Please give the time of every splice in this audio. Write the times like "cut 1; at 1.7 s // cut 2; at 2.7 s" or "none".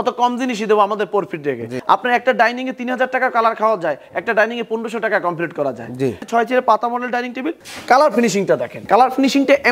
cut 1; at 1.7 s // cut 2; at 6.2 s // cut 3; at 7.6 s // cut 4; at 8.7 s